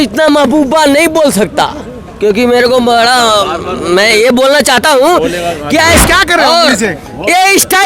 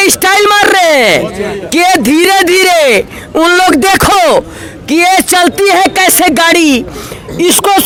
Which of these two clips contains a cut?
first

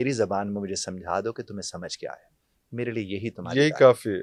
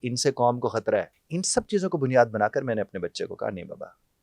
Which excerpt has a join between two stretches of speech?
second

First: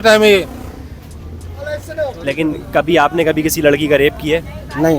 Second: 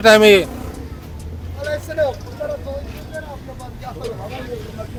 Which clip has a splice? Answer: first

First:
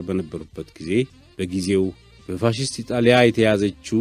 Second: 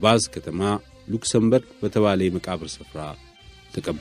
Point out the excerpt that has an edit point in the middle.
first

